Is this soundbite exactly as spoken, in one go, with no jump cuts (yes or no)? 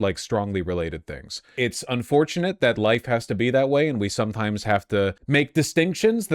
no